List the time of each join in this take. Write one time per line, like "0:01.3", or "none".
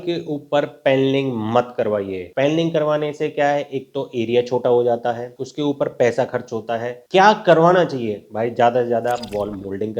none